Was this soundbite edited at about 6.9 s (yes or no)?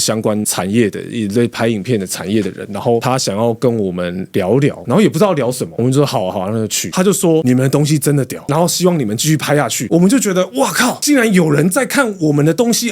yes